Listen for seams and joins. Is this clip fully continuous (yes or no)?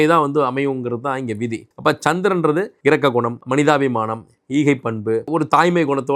yes